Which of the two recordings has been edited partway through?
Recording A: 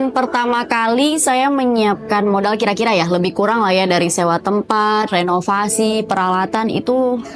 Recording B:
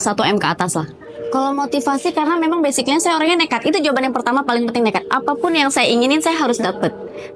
B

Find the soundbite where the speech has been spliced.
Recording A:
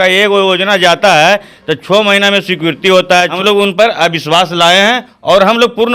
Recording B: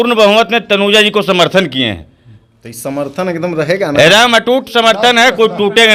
A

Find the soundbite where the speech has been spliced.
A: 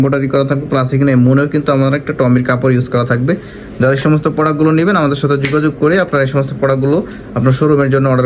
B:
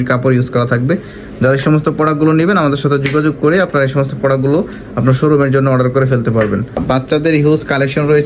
B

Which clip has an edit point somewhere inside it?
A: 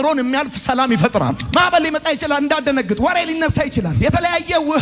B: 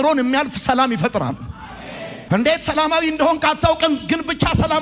A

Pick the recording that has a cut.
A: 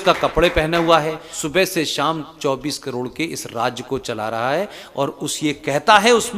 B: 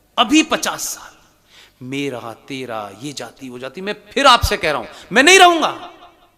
A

